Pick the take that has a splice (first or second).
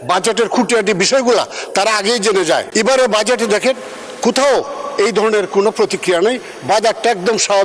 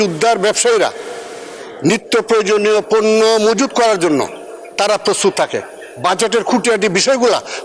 first